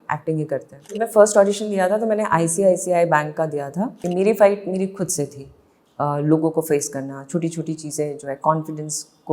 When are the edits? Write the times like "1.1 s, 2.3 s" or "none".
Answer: 1.0 s, 4.0 s